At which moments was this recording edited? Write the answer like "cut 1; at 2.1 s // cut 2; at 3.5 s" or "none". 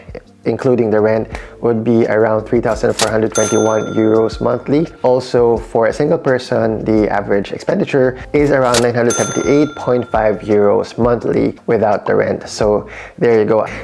none